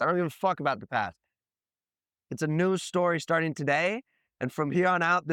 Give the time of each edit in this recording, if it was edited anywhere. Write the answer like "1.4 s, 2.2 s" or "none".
none